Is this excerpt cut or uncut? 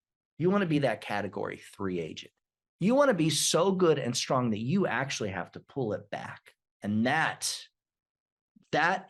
uncut